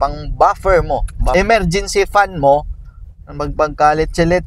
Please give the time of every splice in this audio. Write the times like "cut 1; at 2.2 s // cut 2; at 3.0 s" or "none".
cut 1; at 1.3 s